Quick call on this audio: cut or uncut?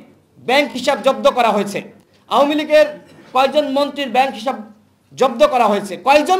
uncut